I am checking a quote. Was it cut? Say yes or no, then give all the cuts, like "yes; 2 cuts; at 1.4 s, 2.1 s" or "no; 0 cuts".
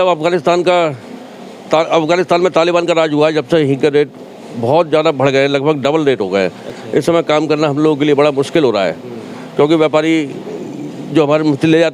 no; 0 cuts